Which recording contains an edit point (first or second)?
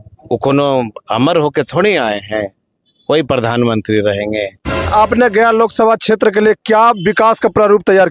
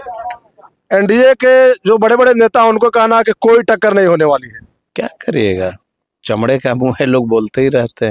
first